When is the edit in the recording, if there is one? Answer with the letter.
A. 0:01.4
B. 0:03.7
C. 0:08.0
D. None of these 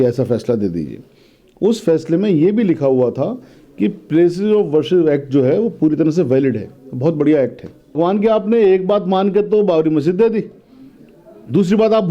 C